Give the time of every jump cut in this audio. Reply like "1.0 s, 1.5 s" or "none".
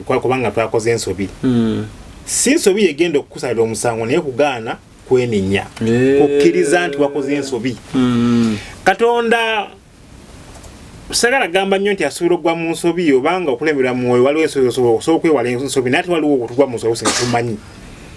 none